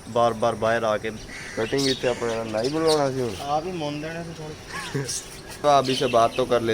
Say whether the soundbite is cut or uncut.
cut